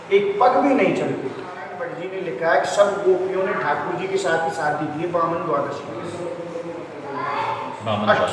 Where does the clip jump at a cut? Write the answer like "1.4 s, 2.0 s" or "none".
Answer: 2.0 s